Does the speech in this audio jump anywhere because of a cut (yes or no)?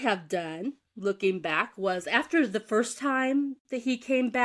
no